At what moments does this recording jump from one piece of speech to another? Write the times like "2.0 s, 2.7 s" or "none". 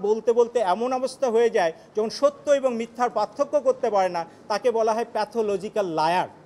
none